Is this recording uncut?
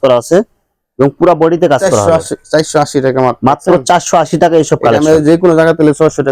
yes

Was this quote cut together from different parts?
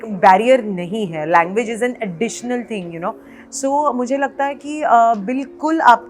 no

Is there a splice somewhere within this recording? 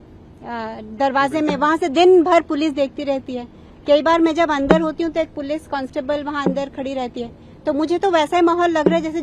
no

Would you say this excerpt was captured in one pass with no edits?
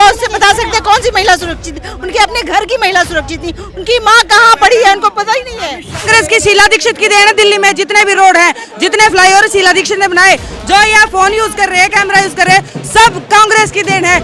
no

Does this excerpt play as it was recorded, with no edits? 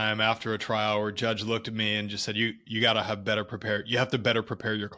yes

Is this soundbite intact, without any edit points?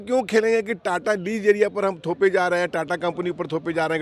yes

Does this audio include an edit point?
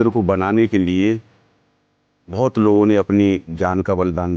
no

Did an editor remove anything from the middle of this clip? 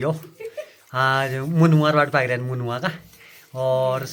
no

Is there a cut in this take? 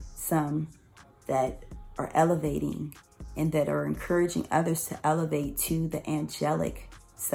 no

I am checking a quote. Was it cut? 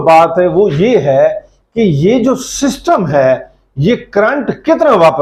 no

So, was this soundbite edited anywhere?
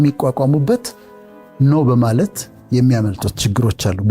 no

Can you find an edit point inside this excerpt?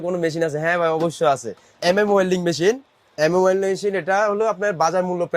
yes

